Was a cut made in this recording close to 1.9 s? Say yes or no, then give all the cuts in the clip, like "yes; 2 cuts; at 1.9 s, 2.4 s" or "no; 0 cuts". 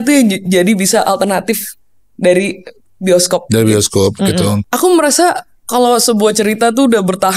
no; 1 cut; at 4.6 s